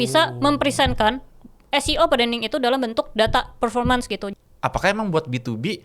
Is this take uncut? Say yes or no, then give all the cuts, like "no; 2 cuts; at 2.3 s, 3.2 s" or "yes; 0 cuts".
no; 1 cut; at 4.3 s